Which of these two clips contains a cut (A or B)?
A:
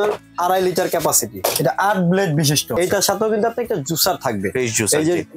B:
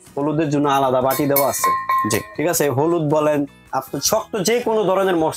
A